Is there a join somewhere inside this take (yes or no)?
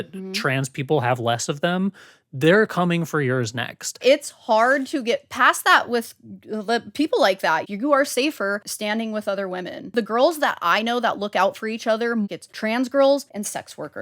yes